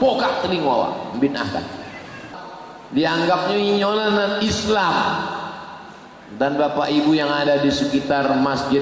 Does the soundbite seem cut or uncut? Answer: cut